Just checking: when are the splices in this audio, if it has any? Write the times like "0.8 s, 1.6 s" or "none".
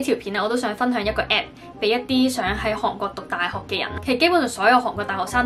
none